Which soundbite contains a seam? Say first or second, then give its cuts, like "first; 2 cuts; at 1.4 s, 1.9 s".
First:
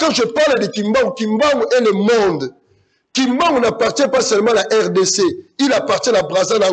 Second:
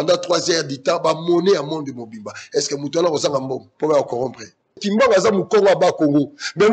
second; 1 cut; at 4.8 s